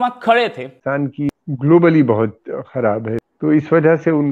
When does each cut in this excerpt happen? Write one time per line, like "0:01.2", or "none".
0:01.2
0:03.2

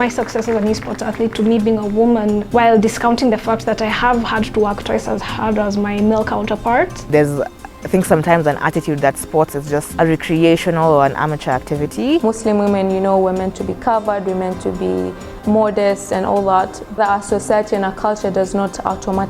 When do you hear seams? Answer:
0:07.1
0:09.9
0:12.2

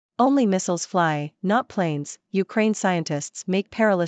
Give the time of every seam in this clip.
none

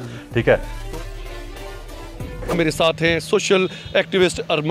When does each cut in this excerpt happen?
none

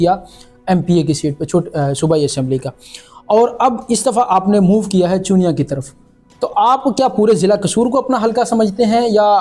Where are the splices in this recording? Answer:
none

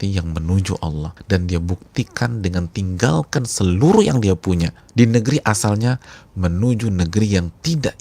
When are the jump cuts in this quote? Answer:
0:01.1
0:04.8

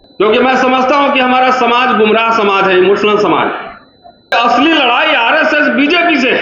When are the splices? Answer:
0:04.3

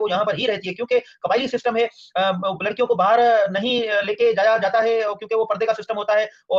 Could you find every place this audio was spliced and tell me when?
none

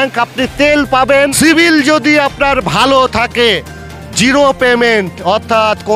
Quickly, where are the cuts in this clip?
0:01.3

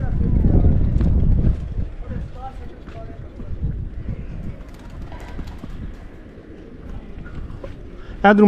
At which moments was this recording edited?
0:06.9

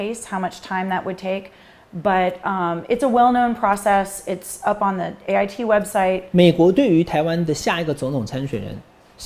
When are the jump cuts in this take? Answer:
0:06.2

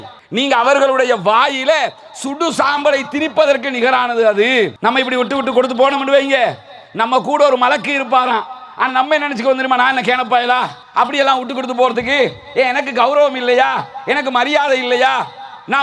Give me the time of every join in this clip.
0:04.7

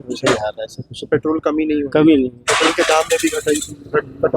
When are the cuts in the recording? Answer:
none

